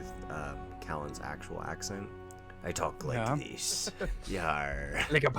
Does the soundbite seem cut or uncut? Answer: cut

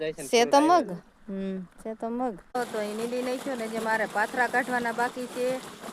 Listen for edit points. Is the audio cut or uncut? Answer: cut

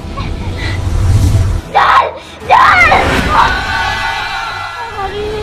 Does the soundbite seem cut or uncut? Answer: cut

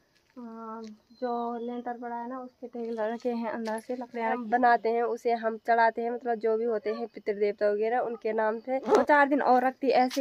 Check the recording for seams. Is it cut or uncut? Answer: cut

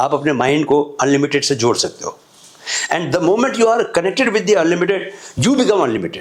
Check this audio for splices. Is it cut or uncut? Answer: uncut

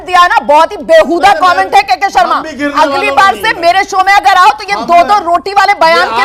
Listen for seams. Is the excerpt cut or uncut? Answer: uncut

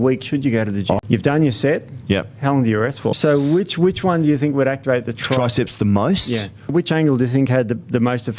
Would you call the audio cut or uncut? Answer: cut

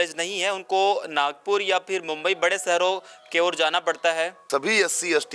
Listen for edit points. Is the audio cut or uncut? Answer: cut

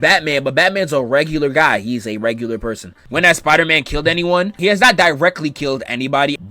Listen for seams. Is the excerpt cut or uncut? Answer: cut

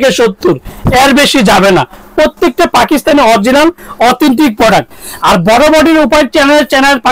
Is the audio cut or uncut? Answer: uncut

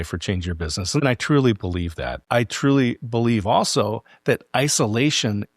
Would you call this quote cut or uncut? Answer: cut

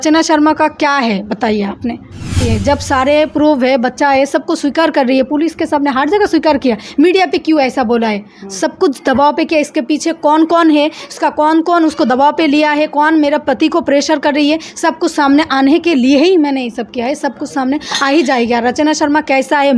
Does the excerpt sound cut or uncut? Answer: cut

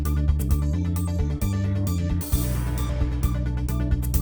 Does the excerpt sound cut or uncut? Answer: uncut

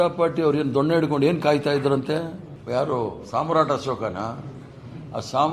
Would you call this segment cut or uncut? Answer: cut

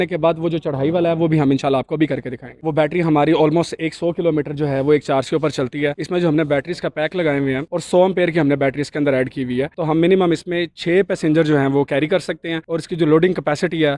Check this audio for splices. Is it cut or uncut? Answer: cut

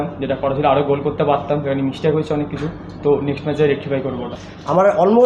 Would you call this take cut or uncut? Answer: cut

